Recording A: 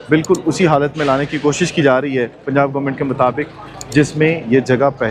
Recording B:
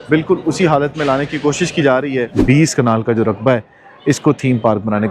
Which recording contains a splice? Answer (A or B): B